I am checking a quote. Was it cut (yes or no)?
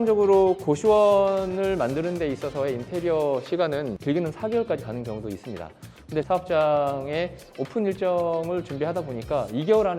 yes